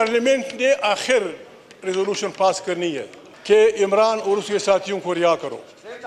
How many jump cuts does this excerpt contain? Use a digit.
0